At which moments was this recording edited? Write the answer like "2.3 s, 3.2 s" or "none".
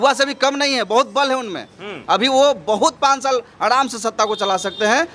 none